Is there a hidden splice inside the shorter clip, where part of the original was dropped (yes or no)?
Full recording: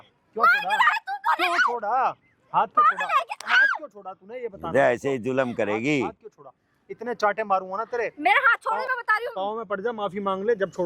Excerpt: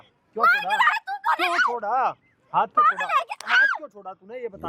no